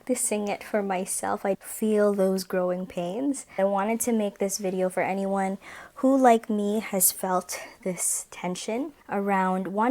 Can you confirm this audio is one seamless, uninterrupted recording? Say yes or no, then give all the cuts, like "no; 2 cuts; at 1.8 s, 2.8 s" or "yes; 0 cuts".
no; 2 cuts; at 1.6 s, 3.6 s